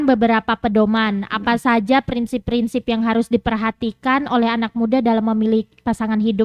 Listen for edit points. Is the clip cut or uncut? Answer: uncut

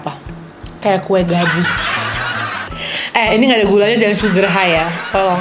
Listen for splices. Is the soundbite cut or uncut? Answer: cut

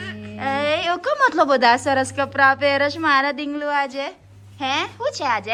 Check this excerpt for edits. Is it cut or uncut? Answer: uncut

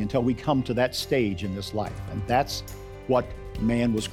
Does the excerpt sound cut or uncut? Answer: uncut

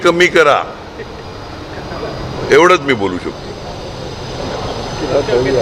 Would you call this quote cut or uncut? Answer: uncut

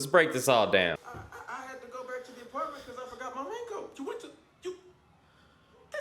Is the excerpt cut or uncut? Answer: cut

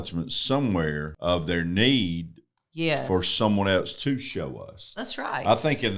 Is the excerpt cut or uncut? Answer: cut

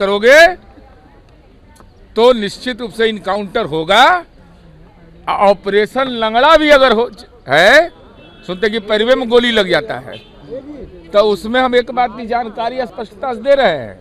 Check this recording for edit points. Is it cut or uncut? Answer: uncut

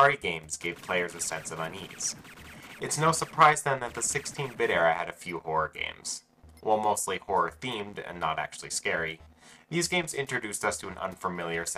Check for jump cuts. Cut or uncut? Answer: cut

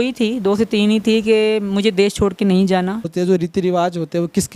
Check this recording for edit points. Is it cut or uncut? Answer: cut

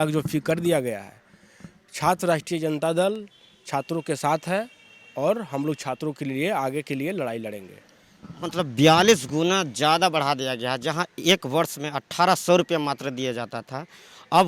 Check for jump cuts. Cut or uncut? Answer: uncut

